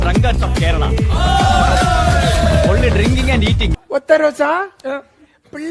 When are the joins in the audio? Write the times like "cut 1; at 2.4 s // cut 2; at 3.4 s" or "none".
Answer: none